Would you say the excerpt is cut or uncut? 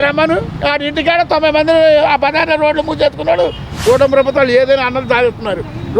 cut